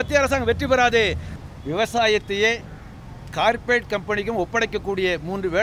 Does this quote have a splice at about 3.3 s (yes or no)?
no